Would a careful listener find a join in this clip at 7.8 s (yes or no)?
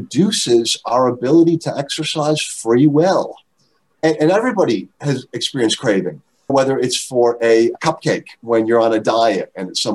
yes